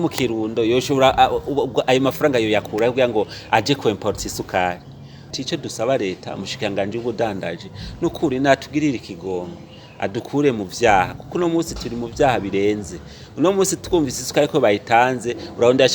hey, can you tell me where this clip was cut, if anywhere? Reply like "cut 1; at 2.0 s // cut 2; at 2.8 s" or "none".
cut 1; at 5.3 s